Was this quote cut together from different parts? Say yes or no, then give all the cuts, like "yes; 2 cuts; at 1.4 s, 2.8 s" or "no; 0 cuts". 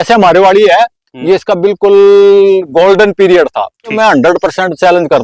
yes; 1 cut; at 4.0 s